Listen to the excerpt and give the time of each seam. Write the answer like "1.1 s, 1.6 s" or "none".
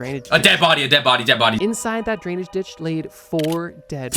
1.6 s